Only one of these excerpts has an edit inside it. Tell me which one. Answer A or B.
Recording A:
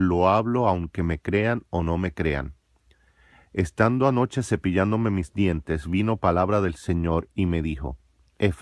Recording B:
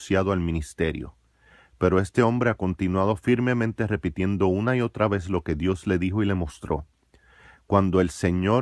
B